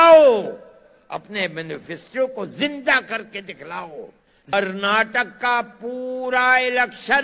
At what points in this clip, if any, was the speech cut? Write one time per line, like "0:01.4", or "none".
0:04.5